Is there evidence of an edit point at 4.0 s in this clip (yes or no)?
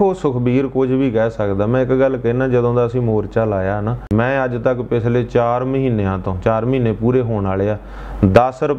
yes